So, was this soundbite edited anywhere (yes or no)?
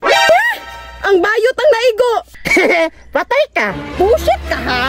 yes